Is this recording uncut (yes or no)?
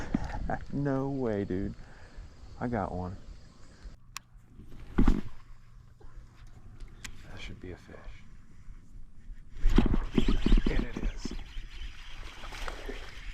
no